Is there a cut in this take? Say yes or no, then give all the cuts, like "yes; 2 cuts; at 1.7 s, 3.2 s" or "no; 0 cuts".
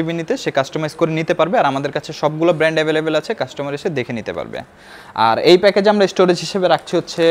no; 0 cuts